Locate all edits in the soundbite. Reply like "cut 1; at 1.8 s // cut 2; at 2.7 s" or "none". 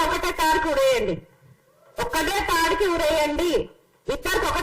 none